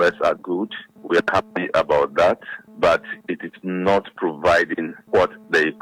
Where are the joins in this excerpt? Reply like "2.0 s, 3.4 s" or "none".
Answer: none